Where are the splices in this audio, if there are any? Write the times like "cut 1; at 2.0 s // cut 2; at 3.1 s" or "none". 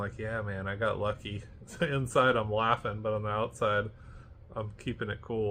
none